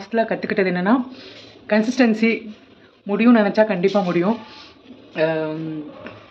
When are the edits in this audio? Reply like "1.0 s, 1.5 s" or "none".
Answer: none